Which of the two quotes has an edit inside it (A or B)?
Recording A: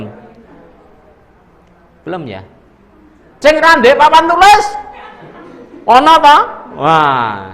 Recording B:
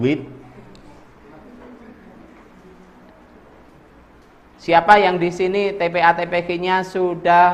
A